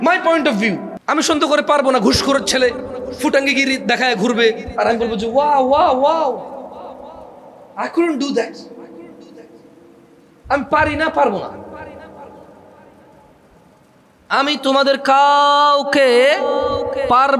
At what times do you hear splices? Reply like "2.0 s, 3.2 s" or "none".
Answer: 0.9 s